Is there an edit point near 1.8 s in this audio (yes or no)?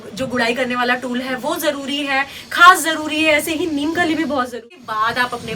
no